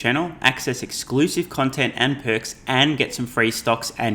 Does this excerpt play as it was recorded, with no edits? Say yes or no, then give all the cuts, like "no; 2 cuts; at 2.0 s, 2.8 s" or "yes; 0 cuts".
yes; 0 cuts